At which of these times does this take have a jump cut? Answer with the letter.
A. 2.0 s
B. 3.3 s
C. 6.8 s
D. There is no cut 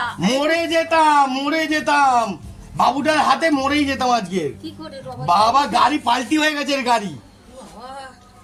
D